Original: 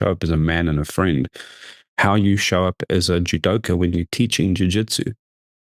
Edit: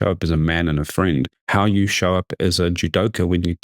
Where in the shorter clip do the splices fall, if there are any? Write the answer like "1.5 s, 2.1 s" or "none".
1.4 s